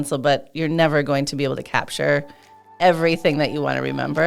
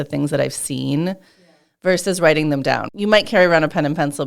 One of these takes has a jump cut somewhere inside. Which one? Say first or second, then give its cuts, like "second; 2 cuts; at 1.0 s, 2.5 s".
second; 1 cut; at 2.8 s